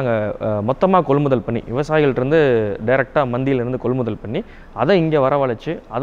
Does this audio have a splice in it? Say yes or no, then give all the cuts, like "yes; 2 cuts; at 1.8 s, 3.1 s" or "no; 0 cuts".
no; 0 cuts